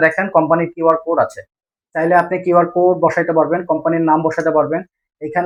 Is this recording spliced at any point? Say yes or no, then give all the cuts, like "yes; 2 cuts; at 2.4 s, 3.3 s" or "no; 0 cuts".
no; 0 cuts